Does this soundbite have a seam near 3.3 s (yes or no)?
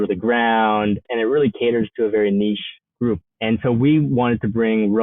yes